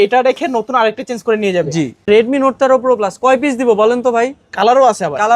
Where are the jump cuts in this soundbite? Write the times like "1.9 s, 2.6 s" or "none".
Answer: 2.1 s